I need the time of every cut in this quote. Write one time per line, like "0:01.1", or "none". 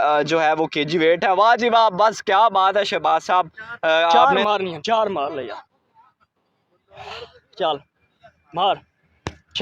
0:04.2